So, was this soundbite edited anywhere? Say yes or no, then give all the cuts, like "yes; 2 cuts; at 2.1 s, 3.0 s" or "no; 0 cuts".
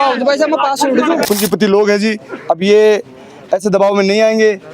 yes; 1 cut; at 1.3 s